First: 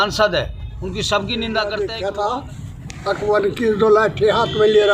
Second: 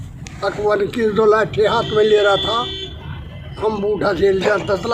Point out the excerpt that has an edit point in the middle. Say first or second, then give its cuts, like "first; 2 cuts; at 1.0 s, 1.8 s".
first; 1 cut; at 1.7 s